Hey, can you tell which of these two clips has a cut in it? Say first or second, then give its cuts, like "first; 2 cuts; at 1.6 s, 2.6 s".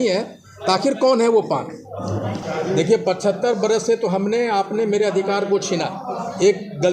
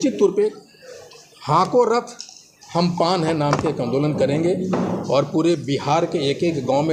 first; 1 cut; at 2.4 s